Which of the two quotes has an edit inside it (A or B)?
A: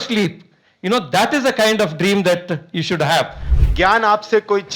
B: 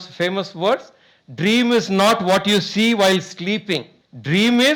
A